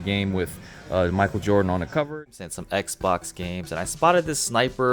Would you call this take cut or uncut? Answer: cut